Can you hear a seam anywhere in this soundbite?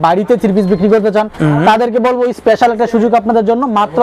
no; 0 cuts

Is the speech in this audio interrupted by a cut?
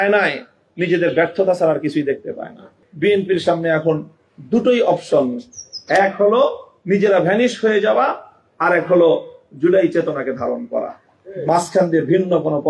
yes; 1 cut; at 2.8 s

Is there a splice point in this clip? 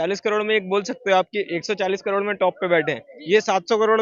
no; 0 cuts

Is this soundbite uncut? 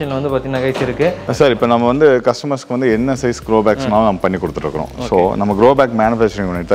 no; 1 cut; at 1.2 s

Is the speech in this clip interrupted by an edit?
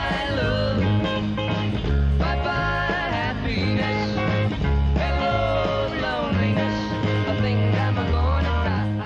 no; 0 cuts

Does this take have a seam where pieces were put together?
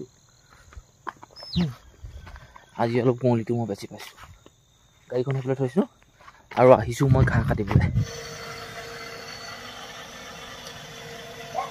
yes; 1 cut; at 8.1 s

